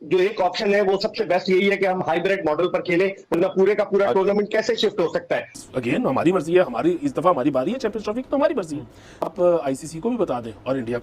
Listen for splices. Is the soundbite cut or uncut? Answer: cut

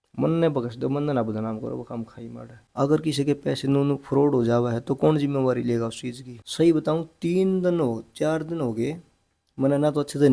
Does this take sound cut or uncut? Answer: cut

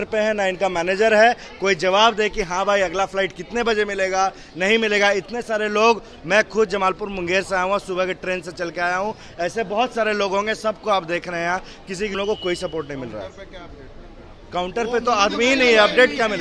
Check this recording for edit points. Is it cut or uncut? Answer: cut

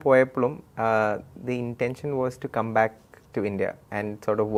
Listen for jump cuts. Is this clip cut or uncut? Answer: uncut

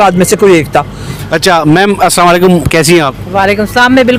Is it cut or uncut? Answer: uncut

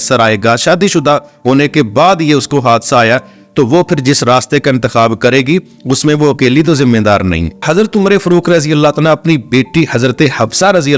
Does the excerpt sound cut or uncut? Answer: cut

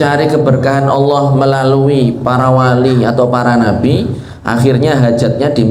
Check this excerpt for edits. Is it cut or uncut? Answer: uncut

